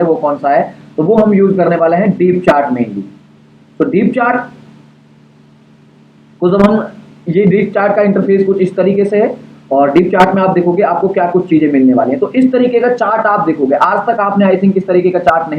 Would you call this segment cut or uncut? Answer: uncut